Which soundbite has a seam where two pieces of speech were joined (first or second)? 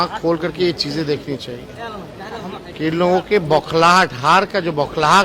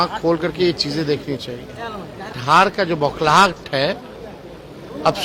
second